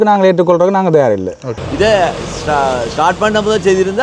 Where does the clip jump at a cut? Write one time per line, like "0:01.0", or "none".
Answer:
0:01.6